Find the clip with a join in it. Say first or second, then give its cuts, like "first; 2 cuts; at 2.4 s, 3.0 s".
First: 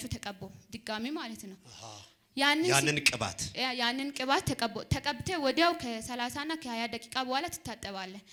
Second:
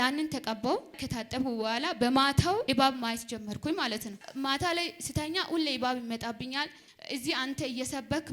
second; 4 cuts; at 1.0 s, 2.6 s, 4.2 s, 6.8 s